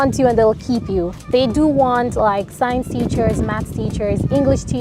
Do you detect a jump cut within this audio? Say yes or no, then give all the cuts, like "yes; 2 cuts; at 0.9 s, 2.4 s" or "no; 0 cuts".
no; 0 cuts